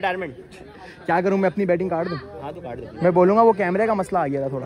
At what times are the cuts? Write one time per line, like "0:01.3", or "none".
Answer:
none